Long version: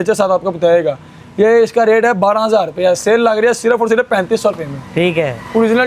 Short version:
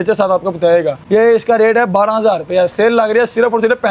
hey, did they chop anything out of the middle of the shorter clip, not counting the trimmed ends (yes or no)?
yes